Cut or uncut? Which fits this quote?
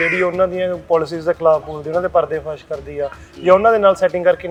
uncut